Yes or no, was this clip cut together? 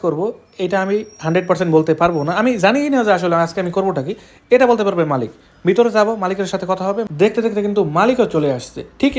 yes